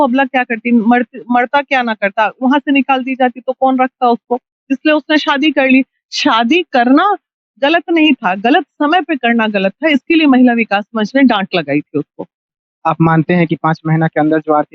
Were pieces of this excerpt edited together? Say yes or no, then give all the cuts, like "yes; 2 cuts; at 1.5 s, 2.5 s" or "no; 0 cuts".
no; 0 cuts